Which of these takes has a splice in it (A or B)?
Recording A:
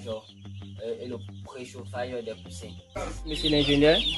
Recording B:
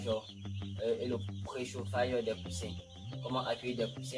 A